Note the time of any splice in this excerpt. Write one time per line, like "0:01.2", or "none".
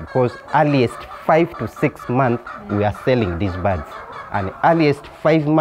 none